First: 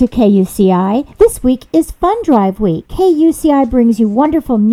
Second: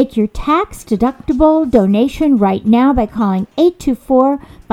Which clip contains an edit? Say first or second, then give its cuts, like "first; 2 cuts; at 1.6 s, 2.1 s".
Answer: first; 2 cuts; at 1.1 s, 2.8 s